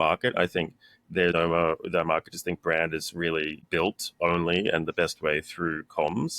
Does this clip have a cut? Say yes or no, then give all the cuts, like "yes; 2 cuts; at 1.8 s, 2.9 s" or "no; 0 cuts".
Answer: yes; 2 cuts; at 1.3 s, 3.6 s